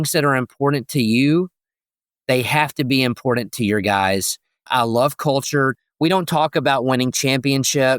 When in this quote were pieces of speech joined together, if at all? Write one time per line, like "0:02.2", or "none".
0:04.7
0:05.8